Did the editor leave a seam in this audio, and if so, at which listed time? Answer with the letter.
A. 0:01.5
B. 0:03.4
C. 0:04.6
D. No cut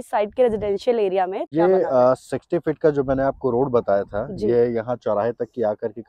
A